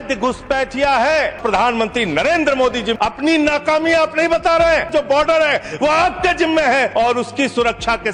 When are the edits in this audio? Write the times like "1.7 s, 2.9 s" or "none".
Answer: 1.4 s, 2.9 s, 4.9 s, 6.9 s